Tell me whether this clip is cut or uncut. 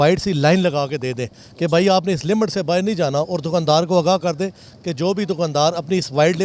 uncut